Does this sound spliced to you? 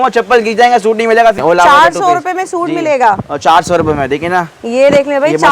yes; 1 cut; at 1.4 s

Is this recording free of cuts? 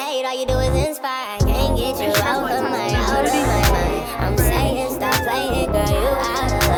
yes; 0 cuts

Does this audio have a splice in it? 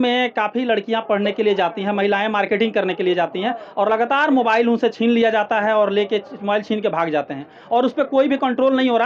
no; 0 cuts

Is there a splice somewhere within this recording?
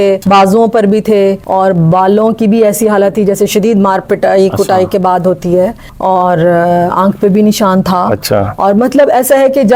no; 0 cuts

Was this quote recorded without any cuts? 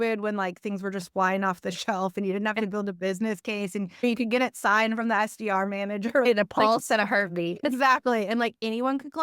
no; 3 cuts; at 4.0 s, 6.3 s, 7.6 s

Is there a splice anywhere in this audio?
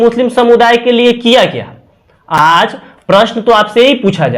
no; 0 cuts

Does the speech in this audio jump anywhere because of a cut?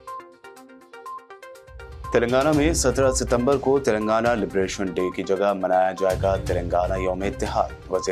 yes; 1 cut; at 1.4 s

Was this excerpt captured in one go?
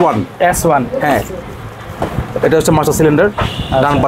yes; 0 cuts

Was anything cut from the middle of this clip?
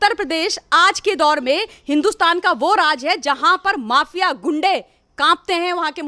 no; 0 cuts

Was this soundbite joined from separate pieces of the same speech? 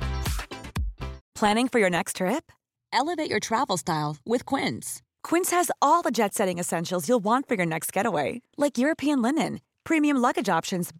no; 0 cuts

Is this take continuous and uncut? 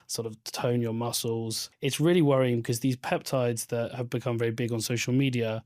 no; 1 cut; at 1.6 s

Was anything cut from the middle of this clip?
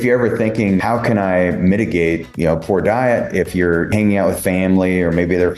yes; 3 cuts; at 0.8 s, 2.3 s, 3.9 s

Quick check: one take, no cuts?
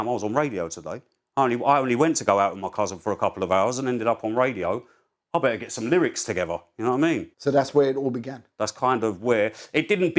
yes; 0 cuts

